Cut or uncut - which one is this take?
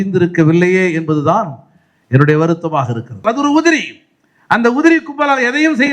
cut